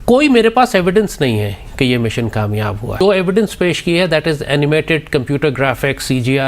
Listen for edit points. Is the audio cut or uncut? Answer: cut